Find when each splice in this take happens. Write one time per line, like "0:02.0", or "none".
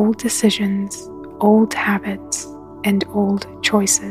none

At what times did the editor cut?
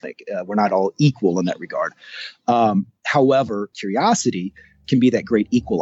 0:03.7
0:04.8

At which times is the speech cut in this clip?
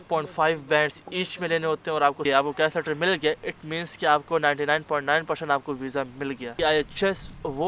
0:02.2
0:06.5

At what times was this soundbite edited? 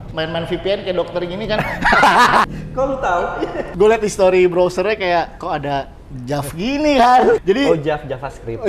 0:02.4
0:03.6
0:07.4

